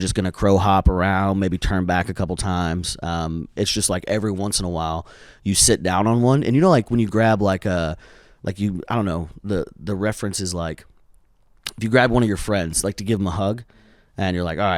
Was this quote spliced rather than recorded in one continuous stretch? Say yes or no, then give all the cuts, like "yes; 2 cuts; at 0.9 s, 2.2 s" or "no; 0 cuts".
no; 0 cuts